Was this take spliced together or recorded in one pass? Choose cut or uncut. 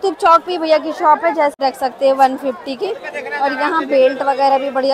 cut